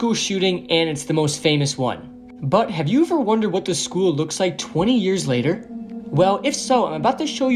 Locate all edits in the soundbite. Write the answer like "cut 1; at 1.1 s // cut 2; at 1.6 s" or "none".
none